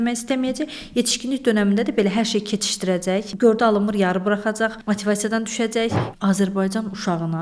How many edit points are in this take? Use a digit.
3